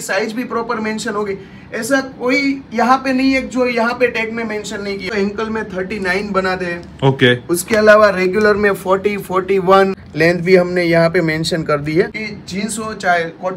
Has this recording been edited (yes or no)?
yes